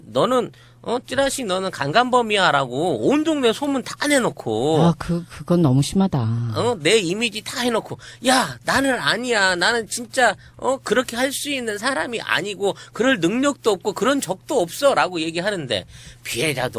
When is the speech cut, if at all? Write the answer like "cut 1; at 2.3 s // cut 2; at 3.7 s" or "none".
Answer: cut 1; at 2.1 s